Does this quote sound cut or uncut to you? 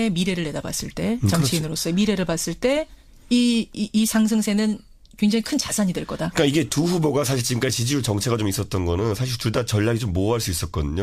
cut